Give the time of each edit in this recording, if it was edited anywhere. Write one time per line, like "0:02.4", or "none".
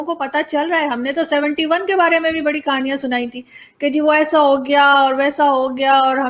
none